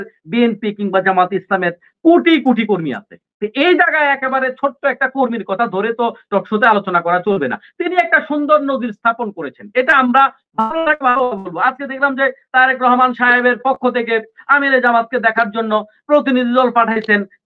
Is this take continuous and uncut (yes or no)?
yes